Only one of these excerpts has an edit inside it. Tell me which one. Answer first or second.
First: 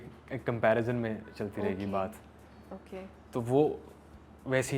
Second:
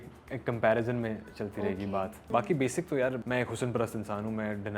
second